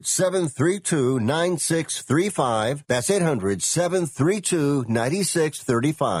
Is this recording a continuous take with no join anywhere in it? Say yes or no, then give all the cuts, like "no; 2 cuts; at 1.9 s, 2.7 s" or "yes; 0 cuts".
yes; 0 cuts